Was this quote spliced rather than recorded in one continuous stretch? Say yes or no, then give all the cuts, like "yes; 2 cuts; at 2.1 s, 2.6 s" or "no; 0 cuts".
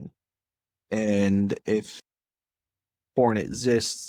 no; 0 cuts